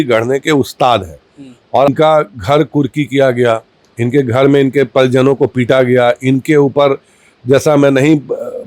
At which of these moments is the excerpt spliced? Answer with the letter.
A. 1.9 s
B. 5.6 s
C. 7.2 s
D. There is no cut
A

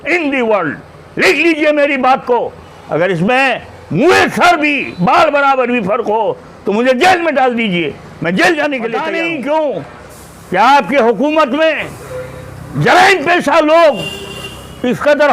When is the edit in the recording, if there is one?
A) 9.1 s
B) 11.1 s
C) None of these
A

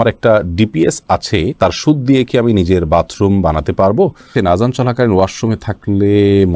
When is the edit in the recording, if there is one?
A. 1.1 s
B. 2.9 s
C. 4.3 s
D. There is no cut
C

